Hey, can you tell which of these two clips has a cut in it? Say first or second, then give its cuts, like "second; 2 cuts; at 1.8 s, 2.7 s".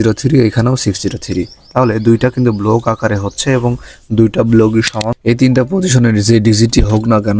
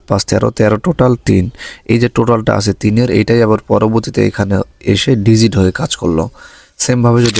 first; 1 cut; at 5.0 s